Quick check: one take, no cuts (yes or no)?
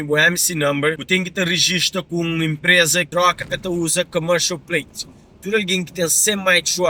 no